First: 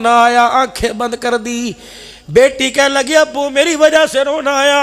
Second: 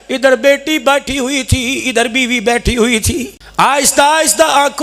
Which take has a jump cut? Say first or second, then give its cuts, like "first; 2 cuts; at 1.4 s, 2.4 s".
second; 1 cut; at 3.7 s